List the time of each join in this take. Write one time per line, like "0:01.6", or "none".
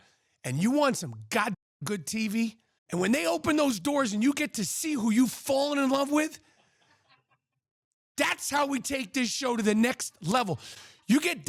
0:02.7

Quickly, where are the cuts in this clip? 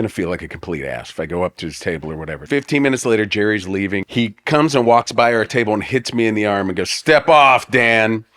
0:02.4
0:04.0

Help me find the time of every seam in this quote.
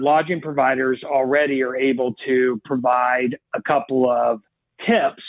none

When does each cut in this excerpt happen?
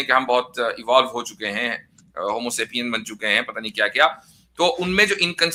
none

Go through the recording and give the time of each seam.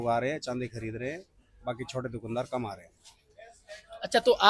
none

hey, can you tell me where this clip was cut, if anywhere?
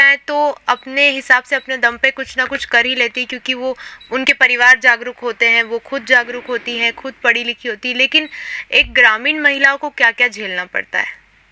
none

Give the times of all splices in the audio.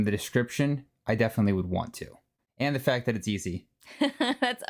0:02.4

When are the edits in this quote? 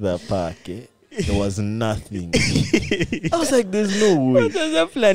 0:03.2

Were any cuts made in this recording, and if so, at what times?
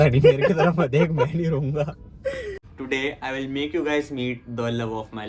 0:02.6

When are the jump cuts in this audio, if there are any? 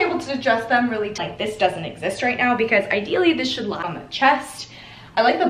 0:01.2
0:03.8

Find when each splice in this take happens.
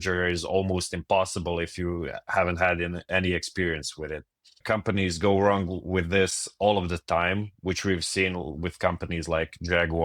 0:04.6

